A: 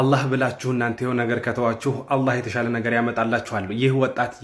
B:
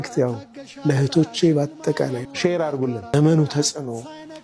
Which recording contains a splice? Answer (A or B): B